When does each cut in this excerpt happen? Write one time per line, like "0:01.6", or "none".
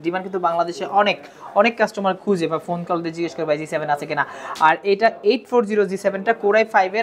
none